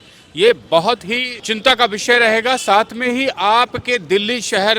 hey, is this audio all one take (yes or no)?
yes